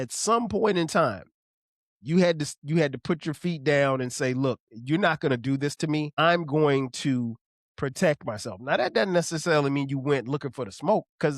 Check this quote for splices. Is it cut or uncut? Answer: cut